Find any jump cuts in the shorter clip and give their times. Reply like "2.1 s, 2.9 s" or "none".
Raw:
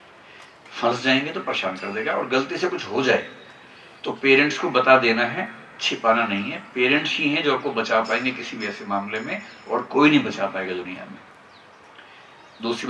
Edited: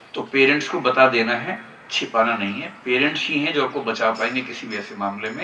none